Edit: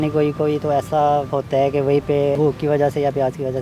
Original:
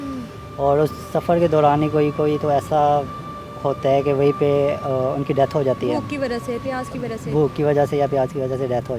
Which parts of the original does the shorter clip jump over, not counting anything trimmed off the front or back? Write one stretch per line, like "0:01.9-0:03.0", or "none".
0:03.1-0:03.6
0:04.7-0:07.3